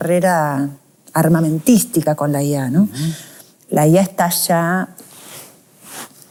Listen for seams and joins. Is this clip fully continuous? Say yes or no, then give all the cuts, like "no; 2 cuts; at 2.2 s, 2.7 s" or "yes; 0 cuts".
yes; 0 cuts